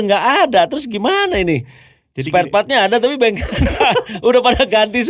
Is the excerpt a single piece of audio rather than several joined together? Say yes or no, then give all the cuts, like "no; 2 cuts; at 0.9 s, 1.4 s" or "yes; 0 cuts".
yes; 0 cuts